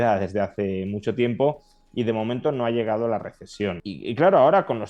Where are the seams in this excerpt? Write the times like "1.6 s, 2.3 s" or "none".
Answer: 3.9 s